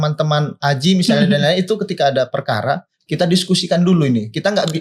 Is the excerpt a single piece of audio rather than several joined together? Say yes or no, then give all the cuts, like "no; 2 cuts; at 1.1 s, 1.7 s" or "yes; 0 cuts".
yes; 0 cuts